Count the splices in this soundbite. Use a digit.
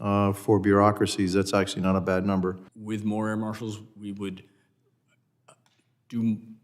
1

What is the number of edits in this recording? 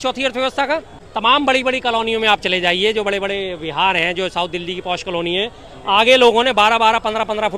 1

